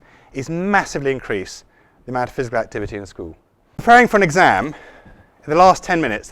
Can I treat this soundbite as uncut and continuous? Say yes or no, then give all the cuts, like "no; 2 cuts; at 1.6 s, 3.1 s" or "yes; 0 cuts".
no; 1 cut; at 3.8 s